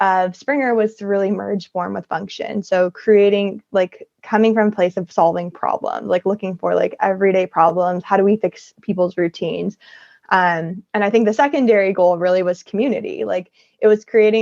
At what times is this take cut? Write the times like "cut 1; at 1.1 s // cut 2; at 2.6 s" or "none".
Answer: none